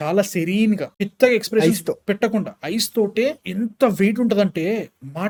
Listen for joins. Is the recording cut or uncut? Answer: uncut